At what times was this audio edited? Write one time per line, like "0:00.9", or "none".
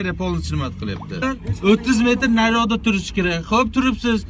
0:01.2